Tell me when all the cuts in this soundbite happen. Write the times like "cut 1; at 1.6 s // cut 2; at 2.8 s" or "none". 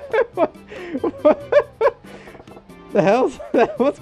none